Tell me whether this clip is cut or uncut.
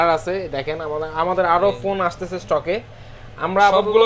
uncut